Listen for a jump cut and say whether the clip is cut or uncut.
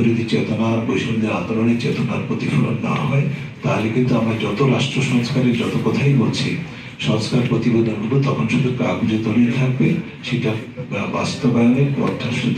uncut